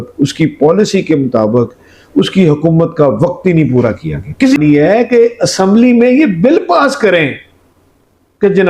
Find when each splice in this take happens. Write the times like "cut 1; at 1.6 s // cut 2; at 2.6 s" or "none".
cut 1; at 4.6 s